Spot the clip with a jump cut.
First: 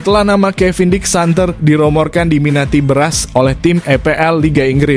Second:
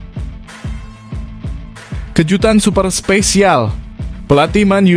second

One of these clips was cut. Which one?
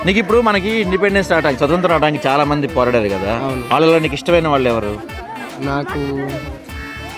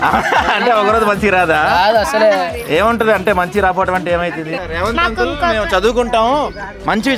second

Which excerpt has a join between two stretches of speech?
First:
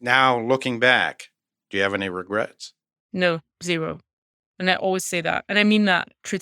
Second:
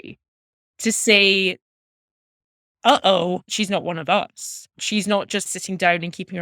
second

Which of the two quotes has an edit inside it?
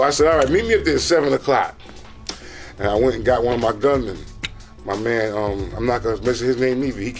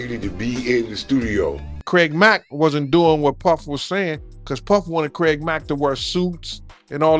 second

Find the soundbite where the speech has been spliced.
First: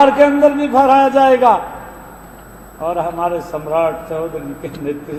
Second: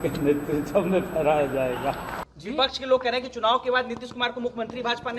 second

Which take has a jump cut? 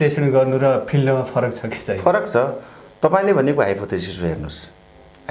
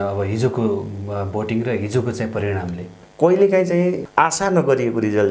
second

